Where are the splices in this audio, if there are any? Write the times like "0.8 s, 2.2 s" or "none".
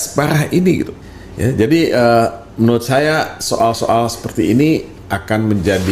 1.0 s